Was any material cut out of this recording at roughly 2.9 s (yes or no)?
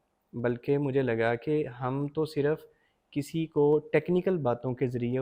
no